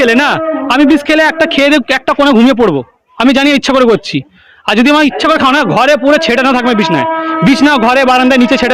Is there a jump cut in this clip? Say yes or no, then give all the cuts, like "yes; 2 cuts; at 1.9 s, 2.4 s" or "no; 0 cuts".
no; 0 cuts